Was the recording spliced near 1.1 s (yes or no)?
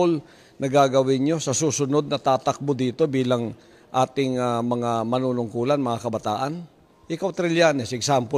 yes